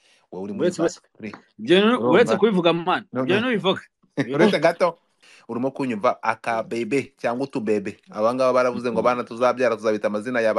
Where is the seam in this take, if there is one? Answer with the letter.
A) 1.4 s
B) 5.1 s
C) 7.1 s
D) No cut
B